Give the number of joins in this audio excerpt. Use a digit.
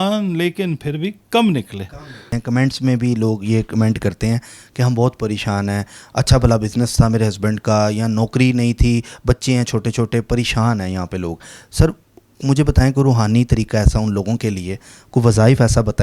1